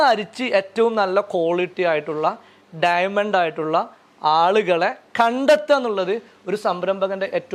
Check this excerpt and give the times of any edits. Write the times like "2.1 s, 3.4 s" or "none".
none